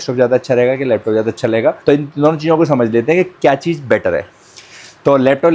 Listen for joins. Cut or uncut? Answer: uncut